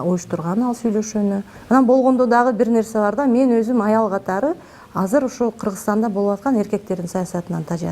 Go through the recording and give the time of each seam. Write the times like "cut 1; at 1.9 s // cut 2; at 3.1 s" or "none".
cut 1; at 1.5 s